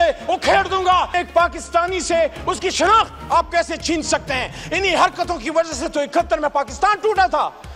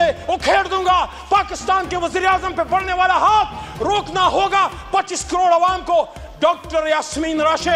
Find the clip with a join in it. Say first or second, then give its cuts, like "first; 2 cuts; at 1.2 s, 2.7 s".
first; 1 cut; at 1.1 s